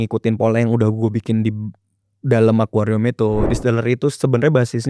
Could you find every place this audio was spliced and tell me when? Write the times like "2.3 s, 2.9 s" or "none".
3.5 s